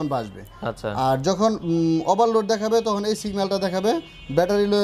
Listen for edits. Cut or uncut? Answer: uncut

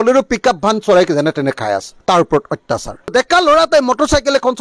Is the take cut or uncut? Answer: uncut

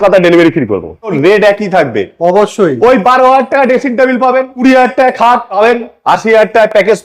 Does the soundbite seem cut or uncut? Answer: cut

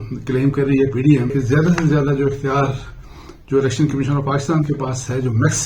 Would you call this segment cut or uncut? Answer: cut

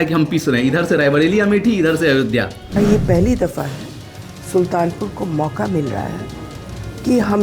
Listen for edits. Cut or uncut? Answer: cut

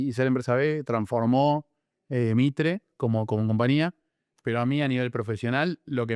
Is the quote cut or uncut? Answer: uncut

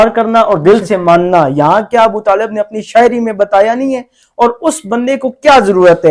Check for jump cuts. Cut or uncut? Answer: uncut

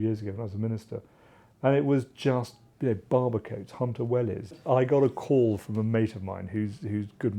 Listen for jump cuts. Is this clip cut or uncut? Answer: cut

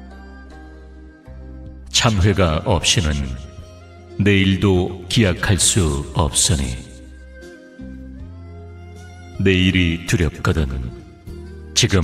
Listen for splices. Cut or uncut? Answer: cut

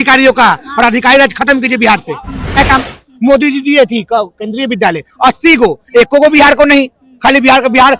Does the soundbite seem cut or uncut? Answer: cut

